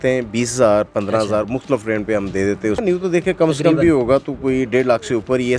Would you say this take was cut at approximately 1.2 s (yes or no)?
no